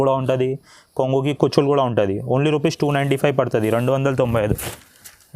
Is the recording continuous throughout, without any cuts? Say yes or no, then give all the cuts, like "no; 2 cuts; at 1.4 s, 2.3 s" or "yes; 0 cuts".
yes; 0 cuts